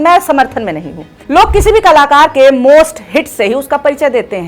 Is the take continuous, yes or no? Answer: no